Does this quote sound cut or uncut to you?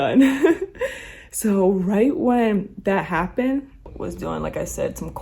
cut